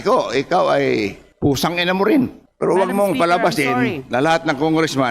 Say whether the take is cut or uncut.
cut